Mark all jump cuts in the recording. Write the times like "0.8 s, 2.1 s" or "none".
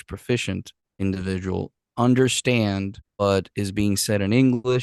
1.0 s, 3.2 s